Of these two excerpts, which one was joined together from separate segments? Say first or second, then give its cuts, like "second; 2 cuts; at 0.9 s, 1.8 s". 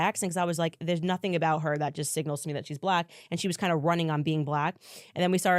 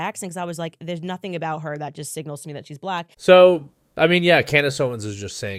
first; 1 cut; at 3.1 s